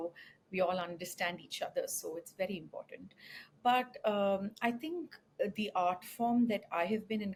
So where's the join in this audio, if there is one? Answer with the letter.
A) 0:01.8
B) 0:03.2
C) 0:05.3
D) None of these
D